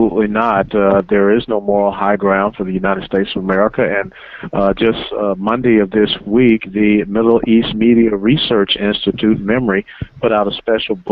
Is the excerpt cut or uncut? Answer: cut